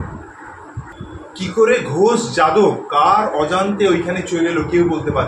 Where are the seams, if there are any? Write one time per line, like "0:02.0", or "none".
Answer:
0:00.9